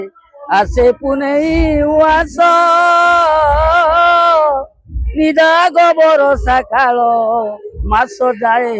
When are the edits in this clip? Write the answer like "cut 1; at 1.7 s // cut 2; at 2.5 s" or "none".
none